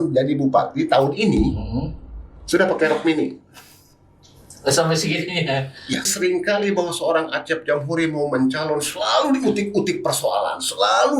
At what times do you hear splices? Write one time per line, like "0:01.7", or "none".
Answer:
0:06.1

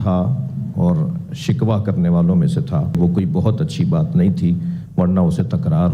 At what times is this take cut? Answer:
0:03.0

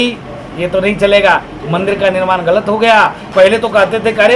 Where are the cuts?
0:03.2

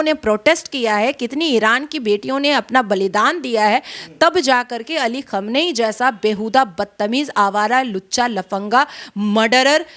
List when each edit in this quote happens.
none

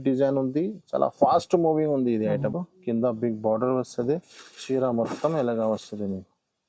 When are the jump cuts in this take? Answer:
0:02.5

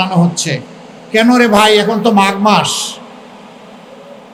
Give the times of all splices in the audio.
none

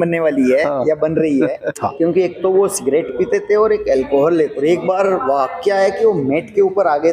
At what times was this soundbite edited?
0:01.7
0:04.6

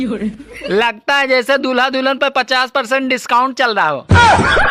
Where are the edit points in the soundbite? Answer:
none

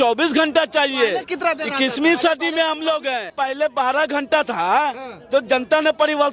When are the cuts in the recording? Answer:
0:03.3

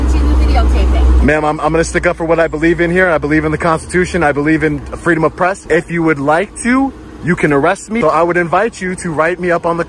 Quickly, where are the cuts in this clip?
0:05.6
0:08.0

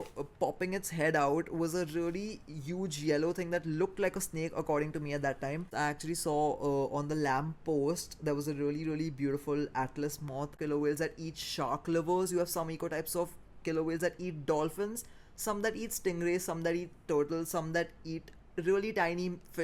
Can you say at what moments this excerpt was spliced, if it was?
0:05.7
0:10.5

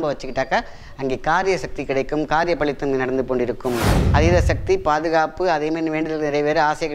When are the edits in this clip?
0:03.9

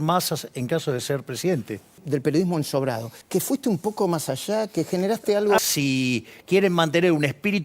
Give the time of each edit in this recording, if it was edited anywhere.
0:02.0
0:03.1
0:05.6

